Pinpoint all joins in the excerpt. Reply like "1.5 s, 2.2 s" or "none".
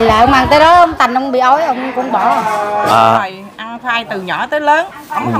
3.2 s